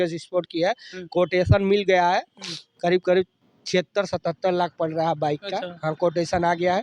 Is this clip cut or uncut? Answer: uncut